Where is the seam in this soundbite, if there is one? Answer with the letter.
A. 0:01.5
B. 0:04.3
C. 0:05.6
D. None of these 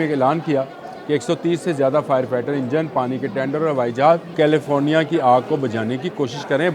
B